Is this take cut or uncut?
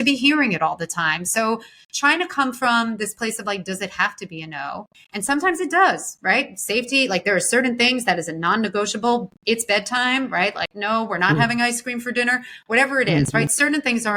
cut